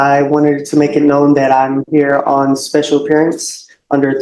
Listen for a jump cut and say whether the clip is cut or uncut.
uncut